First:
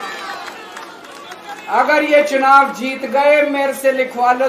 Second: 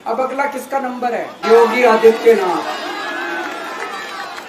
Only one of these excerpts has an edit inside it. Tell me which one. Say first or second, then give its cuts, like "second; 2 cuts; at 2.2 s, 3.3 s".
second; 1 cut; at 1.4 s